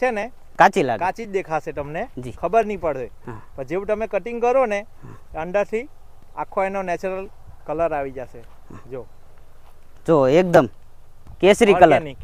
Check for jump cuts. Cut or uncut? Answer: uncut